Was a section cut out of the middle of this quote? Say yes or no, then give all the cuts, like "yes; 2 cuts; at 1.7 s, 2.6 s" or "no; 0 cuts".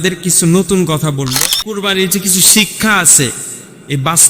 yes; 1 cut; at 1.8 s